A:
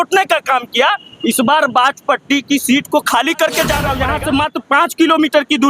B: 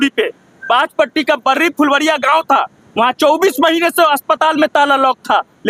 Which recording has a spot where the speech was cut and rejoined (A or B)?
A